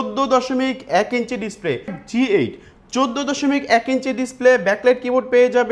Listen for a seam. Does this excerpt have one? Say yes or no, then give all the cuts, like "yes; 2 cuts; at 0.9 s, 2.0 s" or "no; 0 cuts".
yes; 1 cut; at 1.9 s